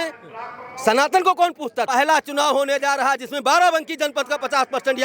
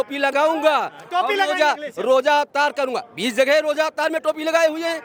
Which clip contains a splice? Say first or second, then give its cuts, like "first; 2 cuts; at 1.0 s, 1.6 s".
first; 1 cut; at 1.9 s